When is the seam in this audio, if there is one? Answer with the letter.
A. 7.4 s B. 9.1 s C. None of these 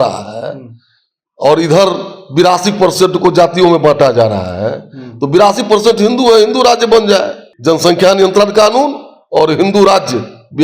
A